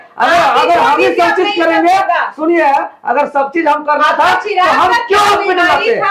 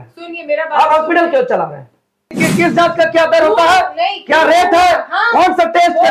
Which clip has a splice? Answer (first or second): second